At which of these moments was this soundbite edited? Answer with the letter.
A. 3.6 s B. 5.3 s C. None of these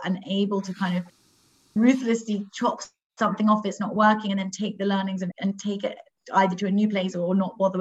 B